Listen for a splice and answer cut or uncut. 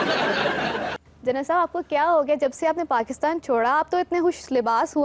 cut